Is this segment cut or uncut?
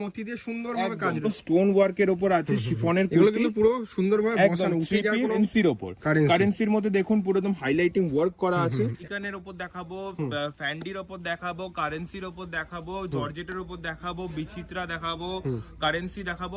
cut